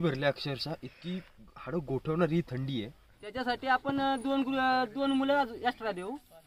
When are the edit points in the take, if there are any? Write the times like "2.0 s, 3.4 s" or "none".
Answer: 3.2 s

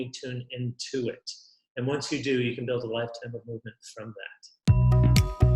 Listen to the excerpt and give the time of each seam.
4.6 s

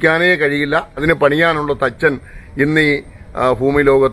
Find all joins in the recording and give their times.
1.0 s

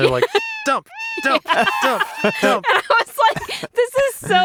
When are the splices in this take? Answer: none

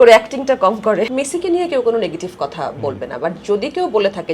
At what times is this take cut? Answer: 1.0 s

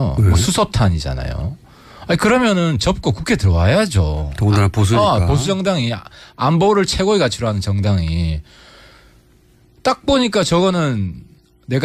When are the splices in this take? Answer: 6.8 s

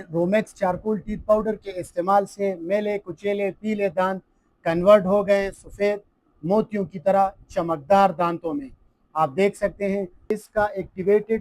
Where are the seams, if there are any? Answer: 10.4 s

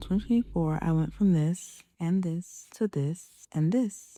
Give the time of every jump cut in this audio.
none

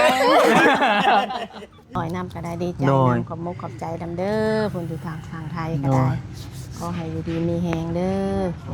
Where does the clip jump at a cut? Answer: 2.0 s

